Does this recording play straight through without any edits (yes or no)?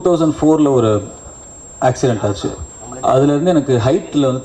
no